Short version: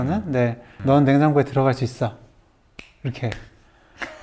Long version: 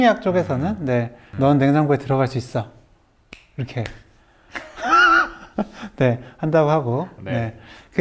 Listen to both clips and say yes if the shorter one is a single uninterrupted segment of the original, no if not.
yes